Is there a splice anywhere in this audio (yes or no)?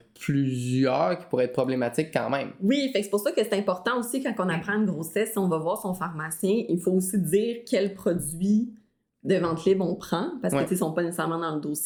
no